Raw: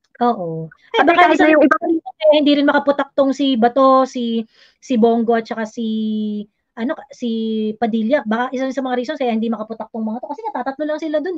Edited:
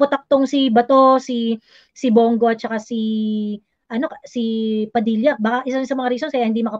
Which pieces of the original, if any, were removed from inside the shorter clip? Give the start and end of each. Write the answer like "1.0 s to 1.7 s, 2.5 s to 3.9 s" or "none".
none